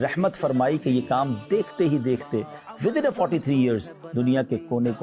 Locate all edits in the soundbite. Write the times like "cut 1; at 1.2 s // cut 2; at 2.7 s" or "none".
none